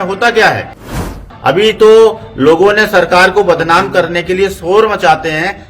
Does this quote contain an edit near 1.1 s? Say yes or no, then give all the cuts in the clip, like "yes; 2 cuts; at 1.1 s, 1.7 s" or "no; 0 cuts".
yes; 1 cut; at 1.1 s